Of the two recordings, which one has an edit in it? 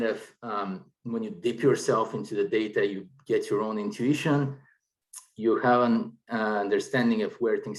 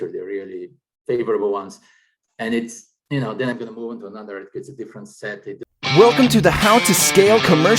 second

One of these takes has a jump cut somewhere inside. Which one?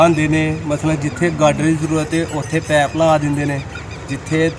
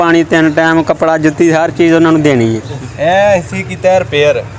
second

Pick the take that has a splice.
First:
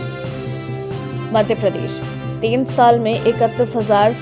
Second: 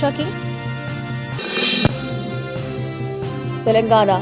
first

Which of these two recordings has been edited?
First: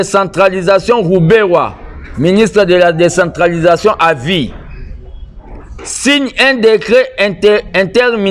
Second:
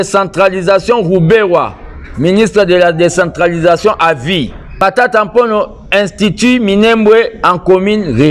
second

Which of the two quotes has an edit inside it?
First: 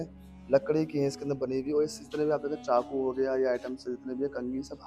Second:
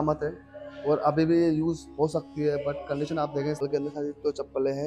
second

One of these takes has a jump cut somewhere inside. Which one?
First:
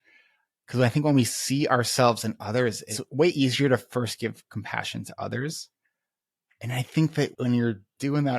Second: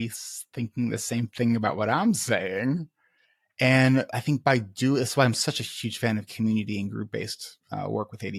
first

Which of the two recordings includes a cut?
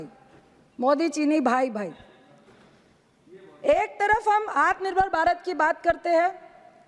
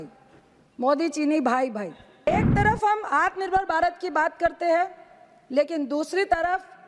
second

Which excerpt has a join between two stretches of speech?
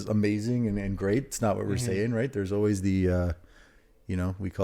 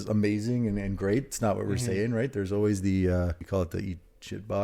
second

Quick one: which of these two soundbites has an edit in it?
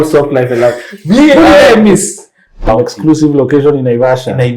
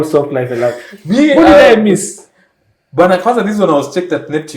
first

